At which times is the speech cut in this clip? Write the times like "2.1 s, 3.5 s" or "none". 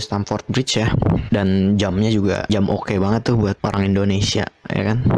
1.2 s, 2.4 s, 3.6 s

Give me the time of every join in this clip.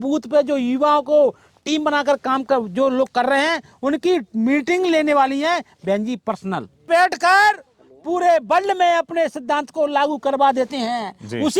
6.9 s

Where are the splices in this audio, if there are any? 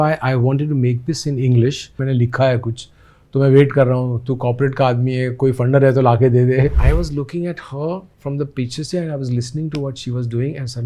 2.0 s, 6.8 s

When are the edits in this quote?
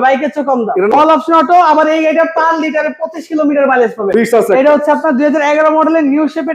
0.9 s, 4.1 s

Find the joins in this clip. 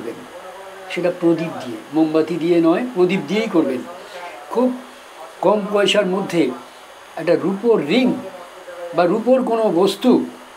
4.5 s

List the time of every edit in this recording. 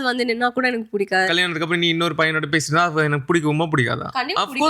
1.3 s

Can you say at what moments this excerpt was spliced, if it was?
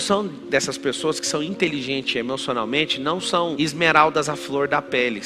none

